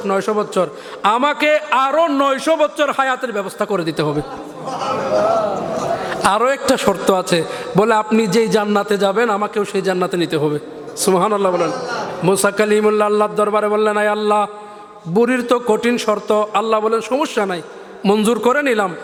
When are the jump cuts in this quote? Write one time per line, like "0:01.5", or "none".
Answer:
none